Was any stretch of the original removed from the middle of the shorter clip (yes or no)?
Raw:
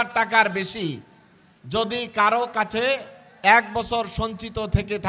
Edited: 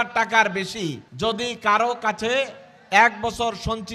yes